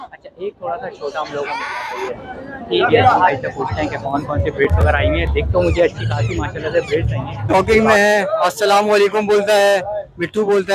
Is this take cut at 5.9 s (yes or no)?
no